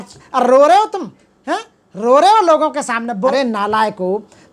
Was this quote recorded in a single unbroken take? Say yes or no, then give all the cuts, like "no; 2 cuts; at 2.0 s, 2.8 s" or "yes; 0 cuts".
no; 1 cut; at 3.3 s